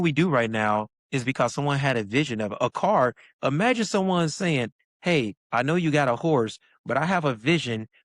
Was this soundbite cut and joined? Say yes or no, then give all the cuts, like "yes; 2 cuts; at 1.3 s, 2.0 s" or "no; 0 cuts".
yes; 1 cut; at 1.0 s